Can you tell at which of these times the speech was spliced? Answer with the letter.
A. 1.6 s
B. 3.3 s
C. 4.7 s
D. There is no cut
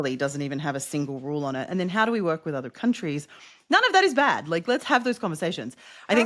D